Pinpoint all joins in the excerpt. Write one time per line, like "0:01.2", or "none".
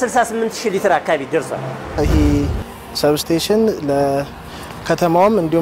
0:02.0